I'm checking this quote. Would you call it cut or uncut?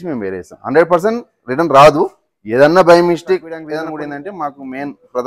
cut